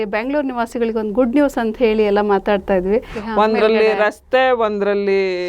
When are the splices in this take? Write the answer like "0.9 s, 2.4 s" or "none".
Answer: 3.2 s